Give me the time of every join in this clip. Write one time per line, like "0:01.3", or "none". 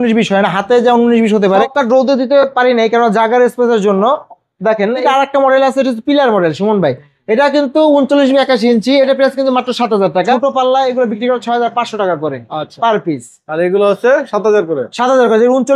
0:01.6
0:05.0
0:10.3